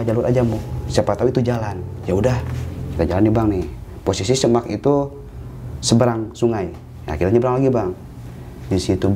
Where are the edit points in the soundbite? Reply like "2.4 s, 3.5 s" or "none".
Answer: none